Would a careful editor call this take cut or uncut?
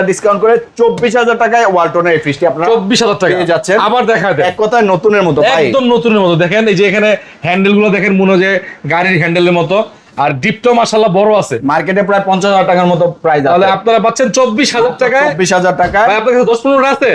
uncut